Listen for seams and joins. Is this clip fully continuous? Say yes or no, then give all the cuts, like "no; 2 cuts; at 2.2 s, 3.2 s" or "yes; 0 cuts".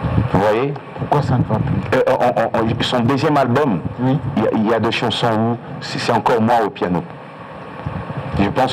yes; 0 cuts